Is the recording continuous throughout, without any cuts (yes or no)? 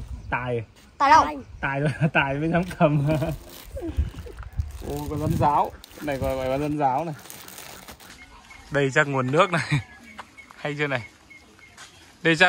no